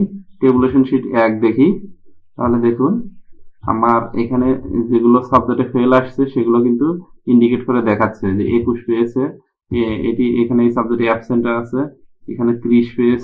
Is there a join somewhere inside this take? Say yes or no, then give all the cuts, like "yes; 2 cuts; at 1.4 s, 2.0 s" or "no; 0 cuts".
no; 0 cuts